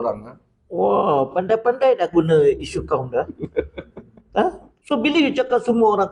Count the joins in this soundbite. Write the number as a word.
one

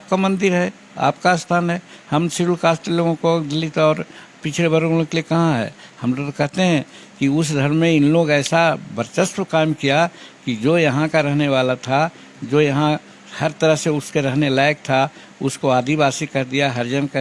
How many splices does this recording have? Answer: zero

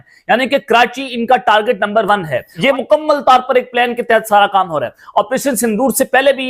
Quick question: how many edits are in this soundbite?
one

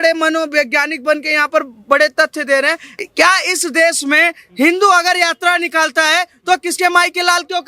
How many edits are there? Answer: one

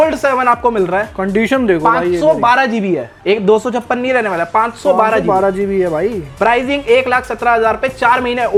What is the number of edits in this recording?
zero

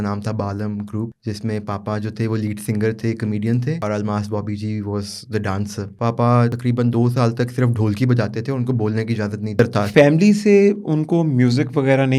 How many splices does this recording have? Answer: five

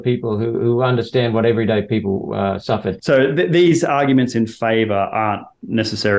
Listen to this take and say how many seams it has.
one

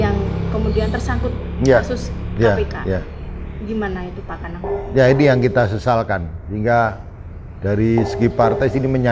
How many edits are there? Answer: zero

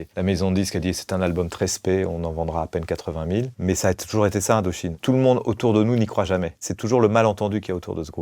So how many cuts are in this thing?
two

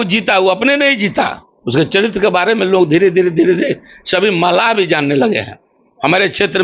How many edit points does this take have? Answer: zero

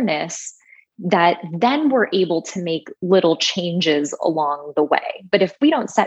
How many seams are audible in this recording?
zero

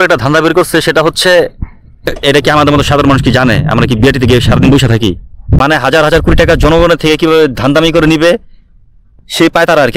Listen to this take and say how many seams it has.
two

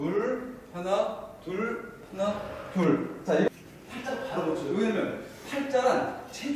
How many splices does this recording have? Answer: one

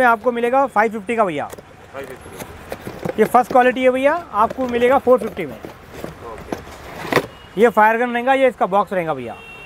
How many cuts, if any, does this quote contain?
zero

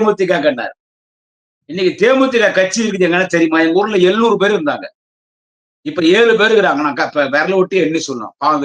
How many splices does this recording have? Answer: zero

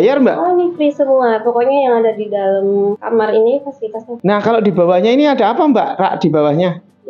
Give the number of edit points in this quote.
two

